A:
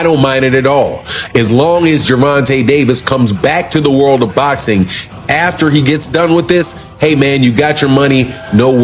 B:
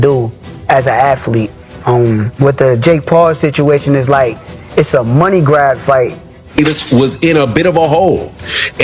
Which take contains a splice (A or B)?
B